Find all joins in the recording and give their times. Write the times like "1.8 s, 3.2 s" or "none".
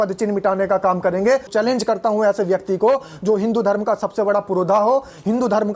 1.5 s